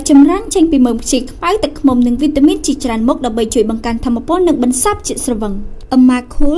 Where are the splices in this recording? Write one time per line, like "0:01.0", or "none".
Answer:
none